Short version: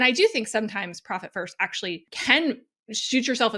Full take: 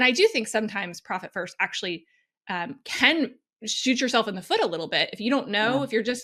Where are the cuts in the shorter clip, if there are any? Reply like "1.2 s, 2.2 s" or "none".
2.1 s